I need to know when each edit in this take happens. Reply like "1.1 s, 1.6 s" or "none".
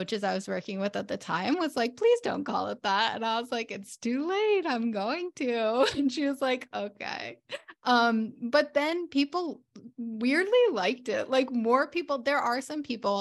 none